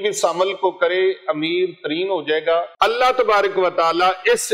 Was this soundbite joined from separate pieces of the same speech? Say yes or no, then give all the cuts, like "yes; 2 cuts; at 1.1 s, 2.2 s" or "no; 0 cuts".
yes; 1 cut; at 2.7 s